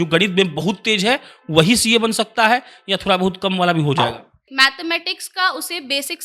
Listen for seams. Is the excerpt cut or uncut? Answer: cut